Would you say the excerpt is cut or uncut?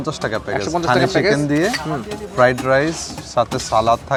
uncut